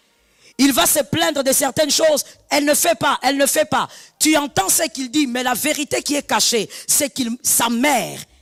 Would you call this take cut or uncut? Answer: uncut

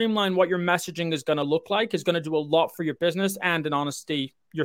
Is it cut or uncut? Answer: uncut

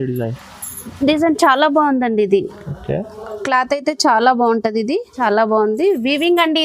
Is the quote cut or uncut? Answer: cut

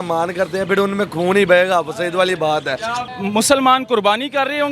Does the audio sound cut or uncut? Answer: cut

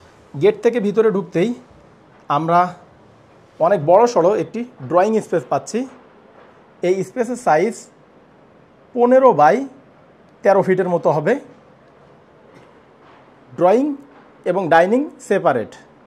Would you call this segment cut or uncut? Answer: uncut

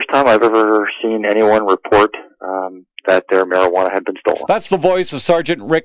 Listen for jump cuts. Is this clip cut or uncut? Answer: cut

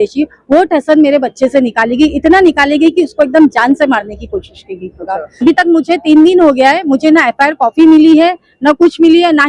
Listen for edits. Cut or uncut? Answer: cut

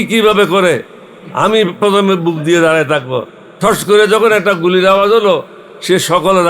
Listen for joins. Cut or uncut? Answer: uncut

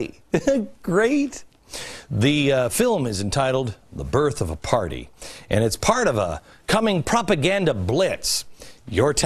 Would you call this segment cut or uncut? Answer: uncut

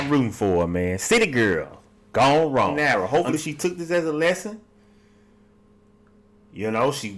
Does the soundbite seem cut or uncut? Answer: cut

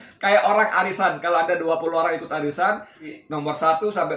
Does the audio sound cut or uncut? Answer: uncut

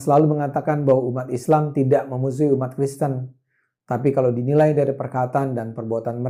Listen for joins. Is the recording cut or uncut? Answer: uncut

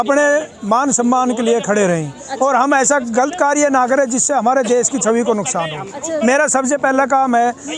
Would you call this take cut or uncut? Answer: uncut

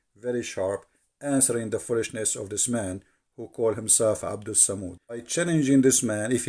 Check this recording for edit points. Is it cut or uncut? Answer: cut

